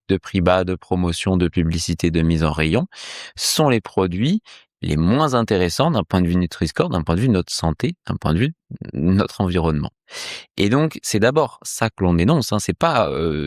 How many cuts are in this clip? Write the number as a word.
zero